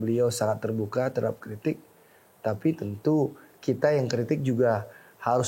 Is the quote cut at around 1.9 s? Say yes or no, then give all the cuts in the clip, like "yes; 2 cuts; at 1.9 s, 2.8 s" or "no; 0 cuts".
no; 0 cuts